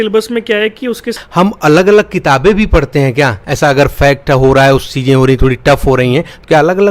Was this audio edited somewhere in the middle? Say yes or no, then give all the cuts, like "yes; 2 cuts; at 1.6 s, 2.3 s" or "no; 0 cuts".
yes; 1 cut; at 1.2 s